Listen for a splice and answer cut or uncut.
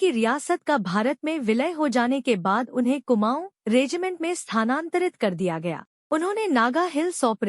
cut